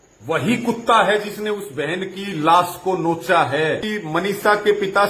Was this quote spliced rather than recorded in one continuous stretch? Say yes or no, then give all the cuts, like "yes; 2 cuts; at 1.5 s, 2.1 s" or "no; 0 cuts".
yes; 1 cut; at 3.9 s